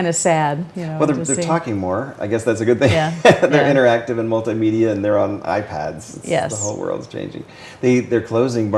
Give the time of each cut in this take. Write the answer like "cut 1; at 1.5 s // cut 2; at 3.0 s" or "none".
cut 1; at 5.4 s